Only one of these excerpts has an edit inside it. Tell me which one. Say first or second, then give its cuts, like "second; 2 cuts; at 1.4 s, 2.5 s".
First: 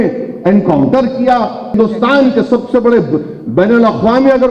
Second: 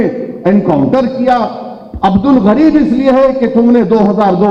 first; 1 cut; at 1.7 s